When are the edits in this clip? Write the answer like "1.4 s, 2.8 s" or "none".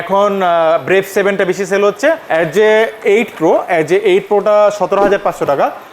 2.2 s